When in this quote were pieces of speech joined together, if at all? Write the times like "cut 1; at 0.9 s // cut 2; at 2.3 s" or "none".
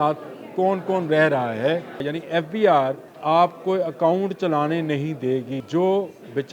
cut 1; at 2.1 s // cut 2; at 3.1 s // cut 3; at 5.6 s